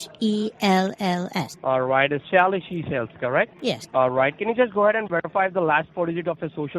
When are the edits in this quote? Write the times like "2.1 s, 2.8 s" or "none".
1.5 s, 3.6 s